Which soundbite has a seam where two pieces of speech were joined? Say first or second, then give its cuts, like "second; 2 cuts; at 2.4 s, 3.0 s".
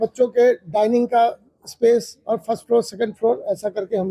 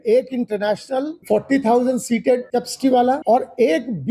second; 3 cuts; at 1.2 s, 2.5 s, 3.2 s